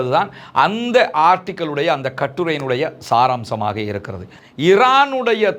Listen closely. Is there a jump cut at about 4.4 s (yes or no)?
yes